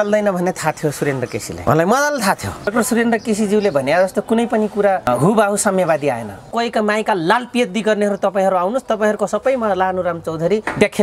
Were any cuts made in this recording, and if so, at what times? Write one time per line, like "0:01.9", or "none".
0:02.7
0:06.5